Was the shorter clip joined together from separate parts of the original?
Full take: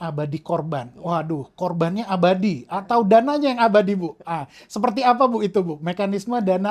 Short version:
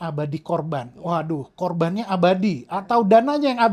no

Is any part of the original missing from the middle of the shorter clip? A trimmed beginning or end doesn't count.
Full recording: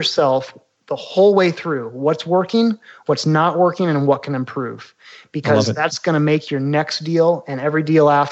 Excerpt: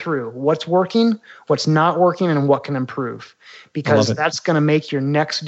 no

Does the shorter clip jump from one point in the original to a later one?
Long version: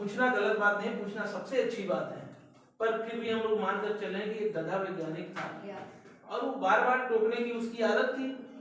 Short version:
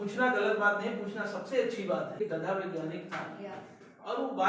yes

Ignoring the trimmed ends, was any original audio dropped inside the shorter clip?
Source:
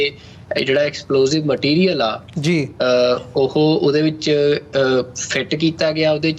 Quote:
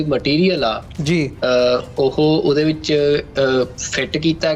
no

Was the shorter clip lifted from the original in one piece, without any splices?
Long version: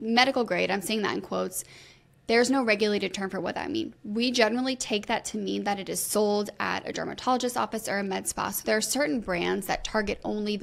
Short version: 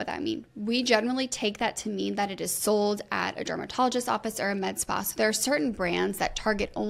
yes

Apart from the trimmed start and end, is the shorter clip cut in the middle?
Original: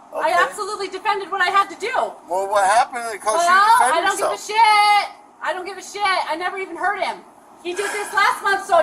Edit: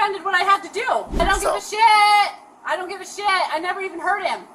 yes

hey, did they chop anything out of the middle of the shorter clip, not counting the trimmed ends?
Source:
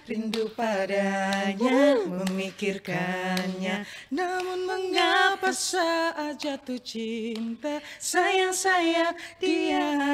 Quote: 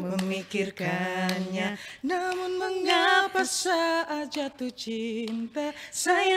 no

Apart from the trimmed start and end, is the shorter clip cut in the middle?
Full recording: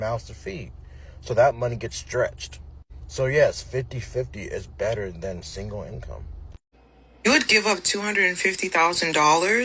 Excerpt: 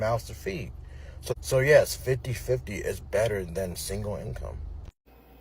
yes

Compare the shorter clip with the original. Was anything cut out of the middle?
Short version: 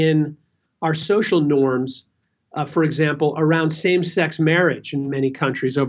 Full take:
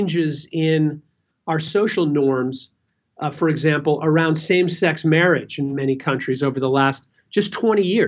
no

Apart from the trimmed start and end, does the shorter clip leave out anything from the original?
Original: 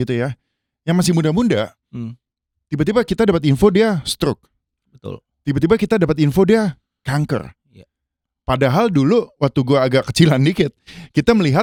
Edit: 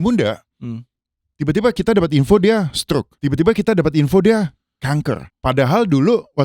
yes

